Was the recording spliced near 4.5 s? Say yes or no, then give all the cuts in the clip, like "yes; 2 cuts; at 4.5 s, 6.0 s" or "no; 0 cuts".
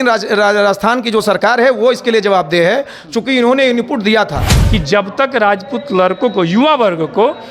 yes; 1 cut; at 4.5 s